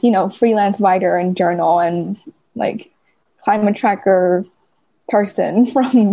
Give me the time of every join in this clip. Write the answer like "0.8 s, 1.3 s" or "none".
none